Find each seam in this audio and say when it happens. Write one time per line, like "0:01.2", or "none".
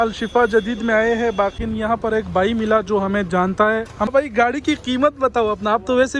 0:01.6
0:04.1